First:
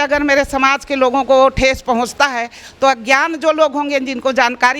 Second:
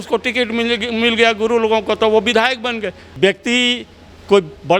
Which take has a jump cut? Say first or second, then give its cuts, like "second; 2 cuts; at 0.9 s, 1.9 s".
second; 1 cut; at 3.0 s